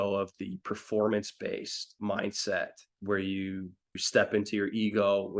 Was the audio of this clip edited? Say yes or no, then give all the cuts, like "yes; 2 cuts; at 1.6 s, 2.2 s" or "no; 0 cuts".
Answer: yes; 3 cuts; at 1.9 s, 2.9 s, 4.0 s